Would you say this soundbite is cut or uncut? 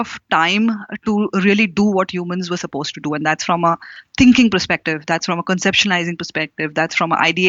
uncut